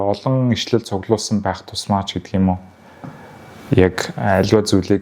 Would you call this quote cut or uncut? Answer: uncut